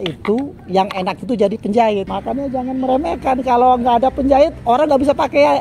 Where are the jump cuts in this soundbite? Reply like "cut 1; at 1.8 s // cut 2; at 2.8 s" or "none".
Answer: cut 1; at 2.1 s